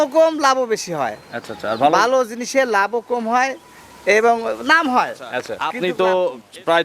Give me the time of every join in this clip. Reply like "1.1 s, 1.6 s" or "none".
5.6 s